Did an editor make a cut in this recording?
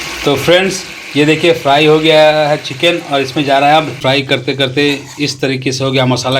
yes; 1 cut; at 4.0 s

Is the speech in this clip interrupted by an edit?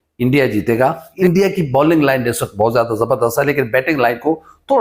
yes; 1 cut; at 1.2 s

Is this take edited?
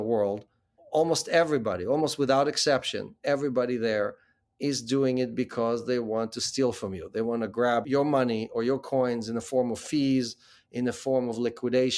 no; 0 cuts

